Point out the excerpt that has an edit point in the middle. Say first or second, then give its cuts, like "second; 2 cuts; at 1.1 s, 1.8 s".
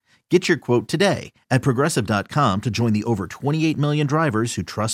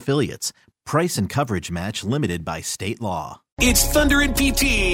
second; 1 cut; at 3.5 s